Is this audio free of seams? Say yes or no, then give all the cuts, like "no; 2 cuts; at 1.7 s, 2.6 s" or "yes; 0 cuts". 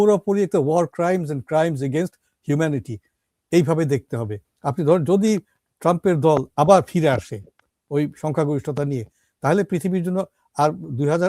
no; 1 cut; at 4.4 s